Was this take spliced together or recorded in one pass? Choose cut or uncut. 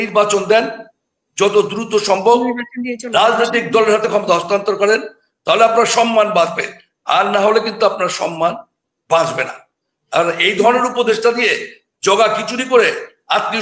uncut